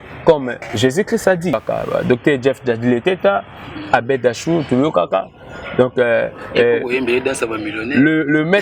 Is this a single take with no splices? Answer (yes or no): no